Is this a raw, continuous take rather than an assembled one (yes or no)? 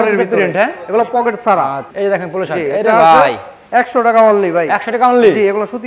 no